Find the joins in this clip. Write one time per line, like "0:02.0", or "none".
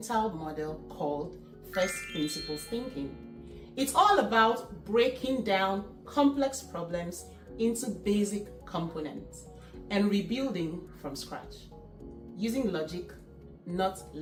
none

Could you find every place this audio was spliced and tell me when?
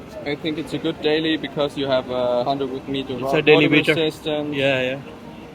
none

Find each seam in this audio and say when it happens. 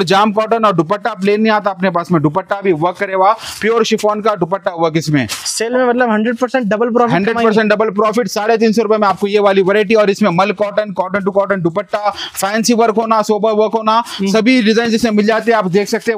none

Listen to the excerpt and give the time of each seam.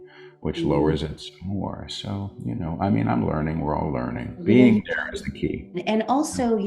0:04.4
0:05.8

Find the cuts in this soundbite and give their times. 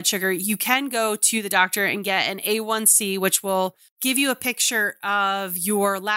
0:03.9

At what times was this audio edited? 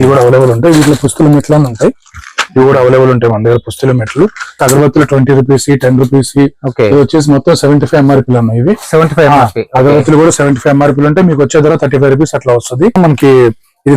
0:04.6
0:13.0

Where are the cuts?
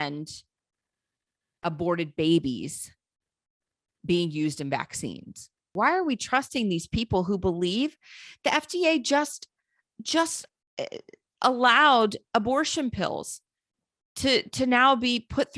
0:05.7

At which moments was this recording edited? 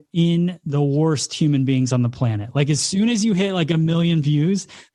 none

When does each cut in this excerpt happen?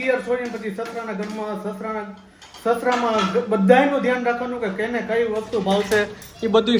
none

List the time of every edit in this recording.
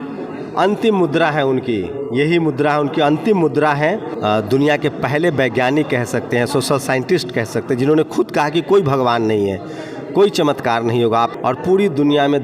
0:04.1
0:11.3

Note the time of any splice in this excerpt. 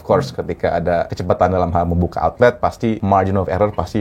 0:01.2
0:03.0

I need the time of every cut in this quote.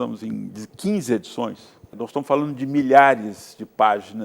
0:01.9

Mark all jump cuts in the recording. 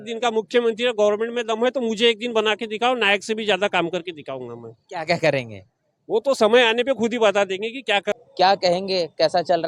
0:08.1

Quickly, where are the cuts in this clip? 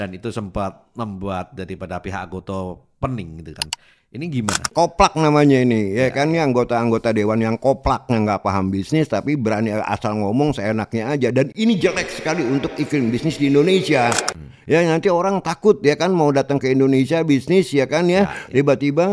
0:04.7

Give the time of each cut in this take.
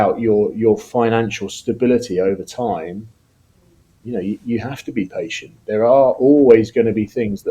none

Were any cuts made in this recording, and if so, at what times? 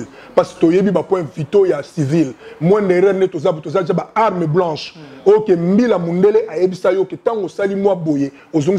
none

